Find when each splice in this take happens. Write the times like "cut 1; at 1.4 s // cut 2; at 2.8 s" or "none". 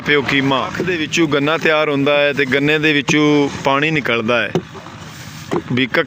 cut 1; at 1.0 s